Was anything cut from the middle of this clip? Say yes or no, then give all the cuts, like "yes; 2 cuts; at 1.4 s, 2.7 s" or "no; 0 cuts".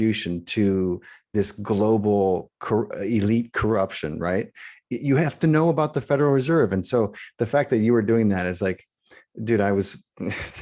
no; 0 cuts